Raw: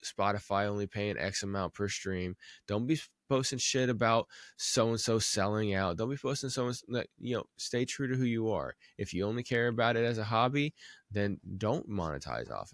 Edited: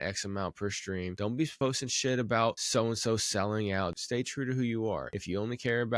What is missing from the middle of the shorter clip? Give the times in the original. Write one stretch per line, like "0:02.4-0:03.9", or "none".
0:02.6-0:03.1
0:04.3-0:04.6
0:06.0-0:07.6
0:08.8-0:09.0